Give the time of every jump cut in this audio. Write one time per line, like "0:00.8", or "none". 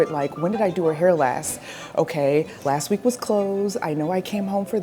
none